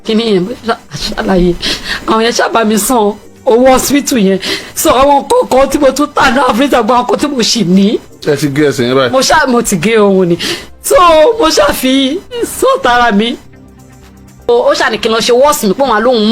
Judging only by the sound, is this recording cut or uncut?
cut